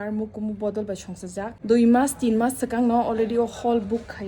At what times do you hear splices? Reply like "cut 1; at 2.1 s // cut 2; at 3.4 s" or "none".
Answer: cut 1; at 1.5 s

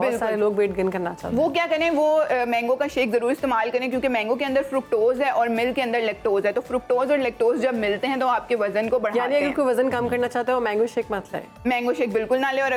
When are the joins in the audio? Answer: none

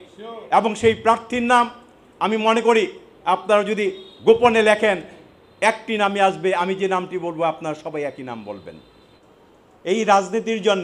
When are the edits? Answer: cut 1; at 9.3 s

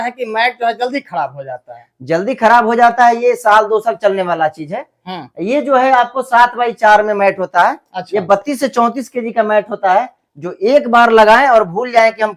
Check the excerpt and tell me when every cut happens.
none

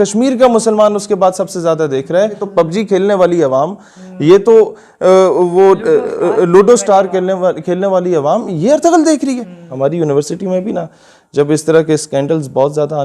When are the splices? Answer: cut 1; at 2.4 s // cut 2; at 9.6 s

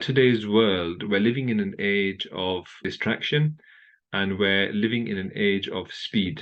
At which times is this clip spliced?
cut 1; at 2.8 s

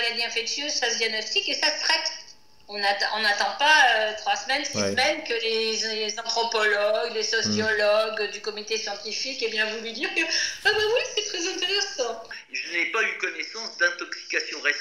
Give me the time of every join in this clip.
cut 1; at 12.3 s

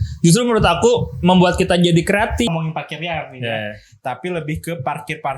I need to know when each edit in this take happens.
cut 1; at 2.5 s

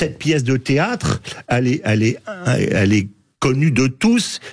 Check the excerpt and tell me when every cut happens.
none

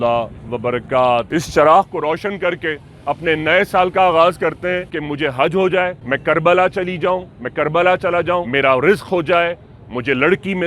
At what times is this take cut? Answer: cut 1; at 1.3 s // cut 2; at 5.0 s // cut 3; at 6.0 s // cut 4; at 8.5 s

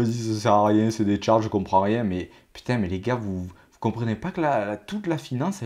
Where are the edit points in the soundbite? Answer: none

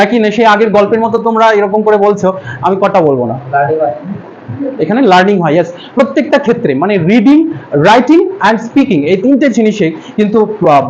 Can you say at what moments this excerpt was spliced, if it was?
none

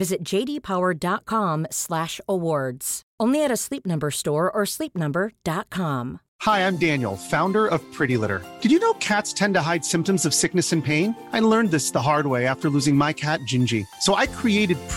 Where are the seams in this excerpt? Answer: cut 1; at 6.3 s

